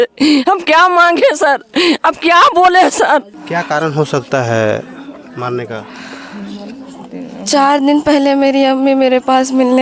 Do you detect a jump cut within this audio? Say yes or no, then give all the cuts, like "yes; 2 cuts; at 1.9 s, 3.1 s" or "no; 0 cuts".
yes; 1 cut; at 3.3 s